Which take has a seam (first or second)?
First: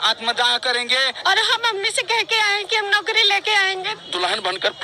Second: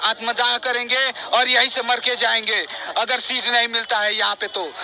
first